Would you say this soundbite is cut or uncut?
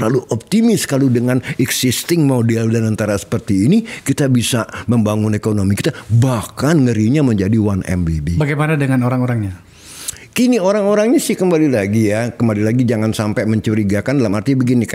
uncut